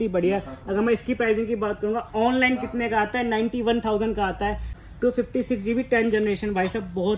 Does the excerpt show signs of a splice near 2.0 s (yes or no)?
no